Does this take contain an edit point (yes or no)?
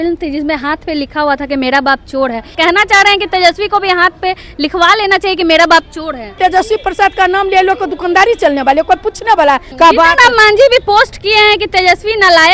yes